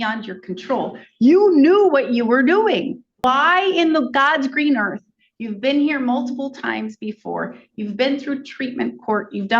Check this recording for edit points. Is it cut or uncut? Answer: cut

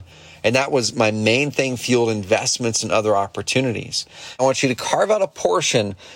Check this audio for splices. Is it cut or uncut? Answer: cut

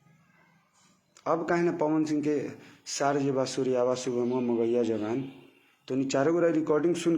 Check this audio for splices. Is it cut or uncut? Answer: uncut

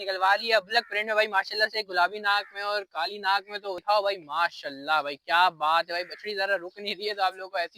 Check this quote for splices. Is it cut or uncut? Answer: cut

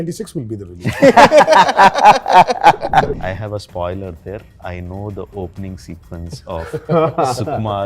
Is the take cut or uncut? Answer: cut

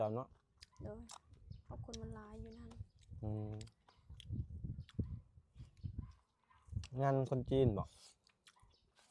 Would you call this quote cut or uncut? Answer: uncut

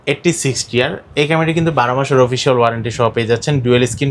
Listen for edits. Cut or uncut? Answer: uncut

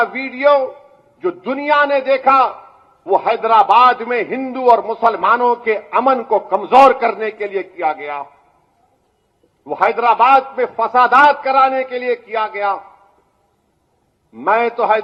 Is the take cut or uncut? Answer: uncut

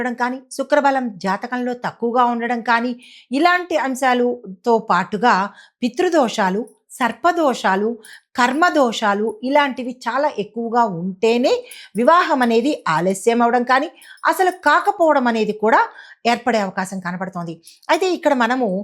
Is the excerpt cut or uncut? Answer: uncut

